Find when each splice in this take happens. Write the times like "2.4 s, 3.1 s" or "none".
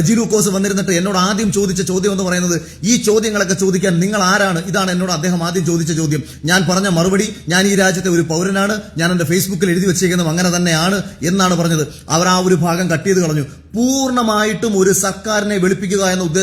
none